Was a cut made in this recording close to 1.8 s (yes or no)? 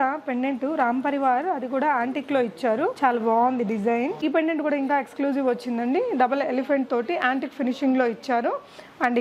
no